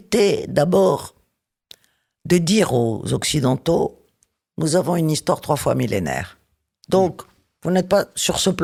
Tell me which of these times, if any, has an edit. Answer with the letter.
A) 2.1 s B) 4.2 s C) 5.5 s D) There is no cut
D